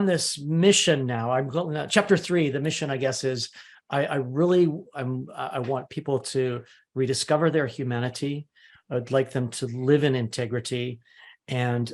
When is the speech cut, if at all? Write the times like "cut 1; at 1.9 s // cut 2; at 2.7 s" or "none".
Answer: none